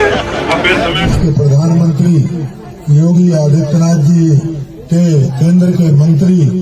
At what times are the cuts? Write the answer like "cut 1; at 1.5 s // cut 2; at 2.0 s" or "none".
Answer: cut 1; at 1.0 s // cut 2; at 5.3 s